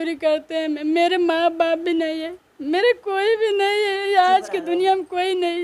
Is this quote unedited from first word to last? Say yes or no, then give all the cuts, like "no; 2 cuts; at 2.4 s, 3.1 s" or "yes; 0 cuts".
yes; 0 cuts